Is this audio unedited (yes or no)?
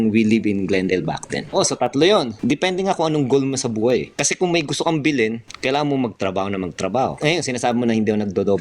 no